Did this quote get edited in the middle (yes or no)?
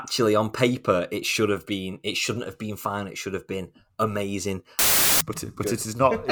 yes